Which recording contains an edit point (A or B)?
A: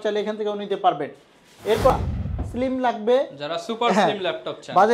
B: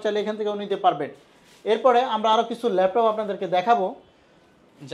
A